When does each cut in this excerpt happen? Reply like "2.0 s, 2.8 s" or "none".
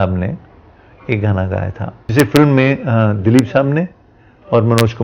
2.0 s